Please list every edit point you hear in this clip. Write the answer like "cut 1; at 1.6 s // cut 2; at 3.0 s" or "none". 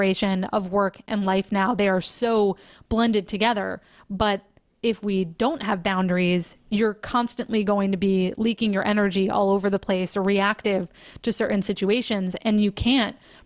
none